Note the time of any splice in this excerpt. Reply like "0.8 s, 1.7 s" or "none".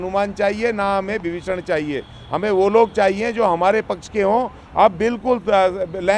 none